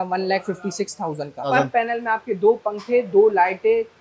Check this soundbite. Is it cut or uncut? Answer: cut